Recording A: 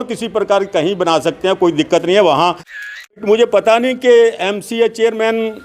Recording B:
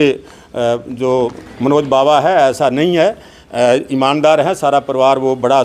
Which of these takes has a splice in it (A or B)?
A